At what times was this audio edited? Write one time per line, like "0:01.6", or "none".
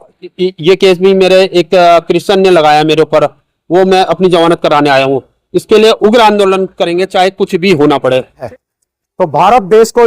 0:08.5